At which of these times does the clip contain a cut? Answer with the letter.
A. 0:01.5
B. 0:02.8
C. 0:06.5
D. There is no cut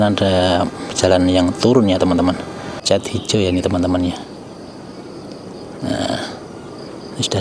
B